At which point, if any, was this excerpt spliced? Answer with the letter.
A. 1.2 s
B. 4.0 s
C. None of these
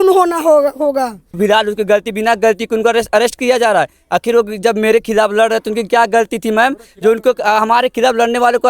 A